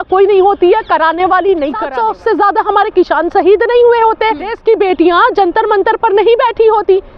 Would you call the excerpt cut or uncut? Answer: cut